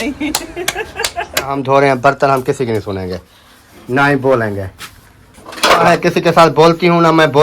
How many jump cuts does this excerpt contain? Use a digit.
2